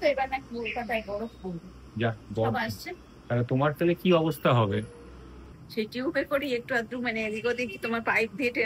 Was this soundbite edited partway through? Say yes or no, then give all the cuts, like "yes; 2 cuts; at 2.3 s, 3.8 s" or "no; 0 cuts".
yes; 1 cut; at 5.6 s